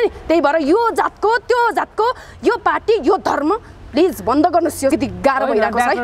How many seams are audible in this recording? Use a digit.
1